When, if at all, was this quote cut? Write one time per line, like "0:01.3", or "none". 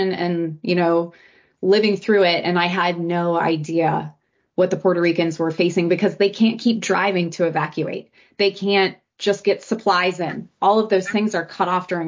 0:09.1

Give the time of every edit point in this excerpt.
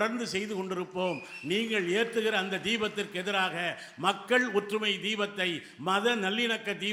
none

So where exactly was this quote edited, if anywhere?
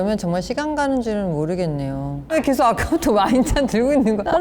0:02.3

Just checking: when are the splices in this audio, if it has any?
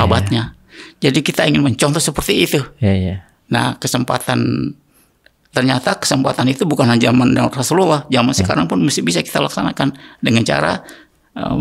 none

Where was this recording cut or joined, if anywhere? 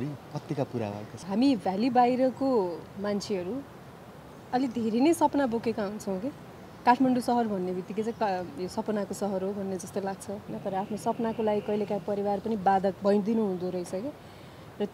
0:01.2
0:10.5
0:13.0

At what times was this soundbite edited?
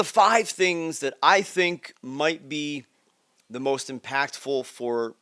none

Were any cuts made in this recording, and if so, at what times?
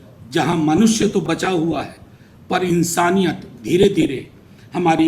0:01.2

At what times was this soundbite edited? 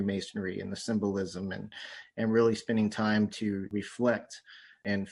none

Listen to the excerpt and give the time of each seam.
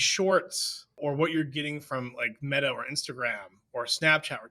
0:00.9

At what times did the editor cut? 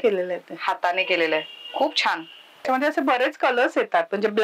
0:02.7

